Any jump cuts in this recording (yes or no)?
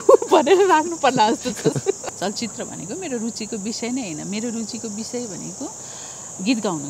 yes